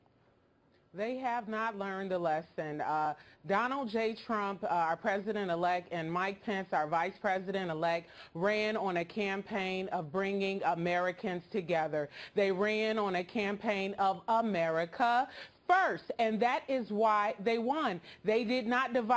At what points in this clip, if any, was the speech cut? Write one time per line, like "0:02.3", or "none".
0:03.3